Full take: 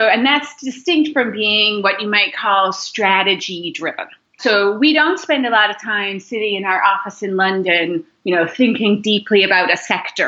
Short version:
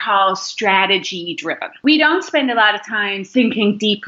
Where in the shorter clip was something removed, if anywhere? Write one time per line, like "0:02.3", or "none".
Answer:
0:01.8
0:03.3